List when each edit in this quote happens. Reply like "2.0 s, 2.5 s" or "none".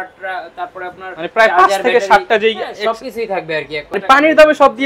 3.9 s